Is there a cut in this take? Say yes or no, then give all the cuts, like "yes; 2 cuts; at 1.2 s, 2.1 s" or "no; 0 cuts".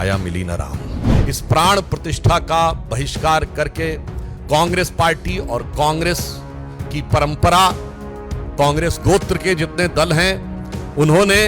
yes; 1 cut; at 1.0 s